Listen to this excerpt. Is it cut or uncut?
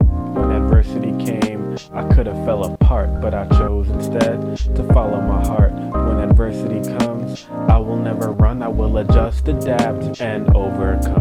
uncut